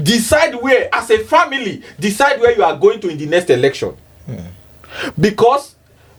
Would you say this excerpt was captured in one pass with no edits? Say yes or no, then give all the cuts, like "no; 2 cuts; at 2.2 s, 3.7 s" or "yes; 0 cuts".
yes; 0 cuts